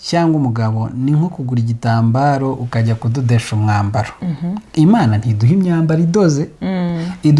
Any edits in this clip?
no; 0 cuts

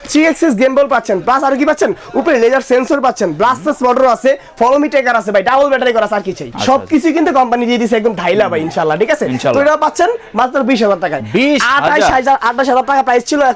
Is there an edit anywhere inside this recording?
no; 0 cuts

